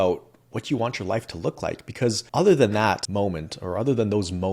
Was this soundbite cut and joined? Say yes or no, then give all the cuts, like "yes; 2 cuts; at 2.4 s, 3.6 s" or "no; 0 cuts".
yes; 2 cuts; at 2.2 s, 3.0 s